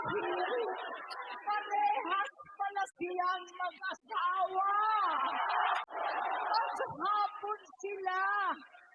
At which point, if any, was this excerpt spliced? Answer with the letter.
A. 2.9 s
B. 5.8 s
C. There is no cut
B